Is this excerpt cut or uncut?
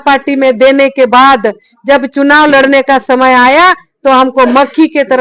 uncut